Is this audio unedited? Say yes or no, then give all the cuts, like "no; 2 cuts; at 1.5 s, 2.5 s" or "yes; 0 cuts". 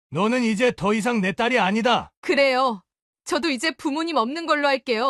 no; 1 cut; at 2.1 s